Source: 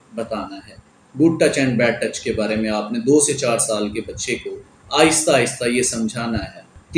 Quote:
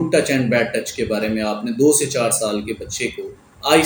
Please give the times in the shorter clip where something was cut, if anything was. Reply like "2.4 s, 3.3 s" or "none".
none